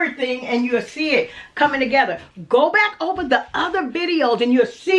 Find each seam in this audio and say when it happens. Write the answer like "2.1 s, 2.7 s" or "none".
none

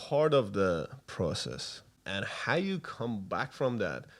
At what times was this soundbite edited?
2.0 s

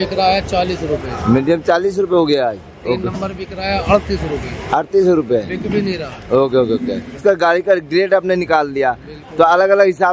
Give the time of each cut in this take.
7.2 s

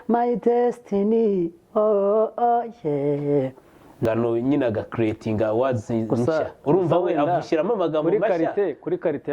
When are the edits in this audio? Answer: 4.0 s

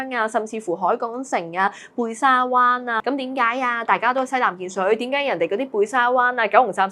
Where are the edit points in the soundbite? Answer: 3.0 s

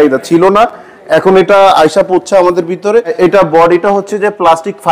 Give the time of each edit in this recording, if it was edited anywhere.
3.1 s

